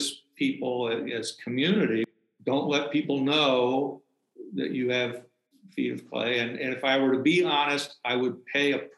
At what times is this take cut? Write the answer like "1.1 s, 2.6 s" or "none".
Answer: 2.1 s